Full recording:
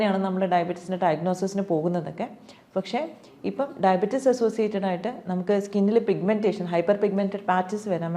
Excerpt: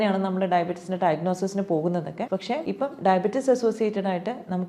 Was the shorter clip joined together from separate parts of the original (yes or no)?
yes